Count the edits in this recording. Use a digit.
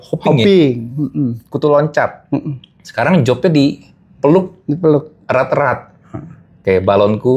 0